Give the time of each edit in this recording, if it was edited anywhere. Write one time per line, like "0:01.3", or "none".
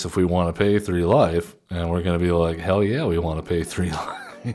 none